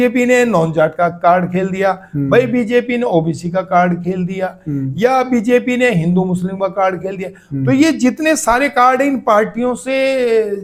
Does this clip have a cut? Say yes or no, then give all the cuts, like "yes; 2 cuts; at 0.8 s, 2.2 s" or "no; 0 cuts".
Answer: no; 0 cuts